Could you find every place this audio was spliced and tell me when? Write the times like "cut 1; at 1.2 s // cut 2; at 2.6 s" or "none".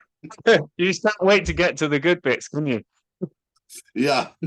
none